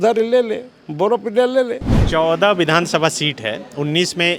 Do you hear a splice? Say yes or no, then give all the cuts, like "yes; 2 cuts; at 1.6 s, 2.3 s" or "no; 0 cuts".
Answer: yes; 1 cut; at 1.9 s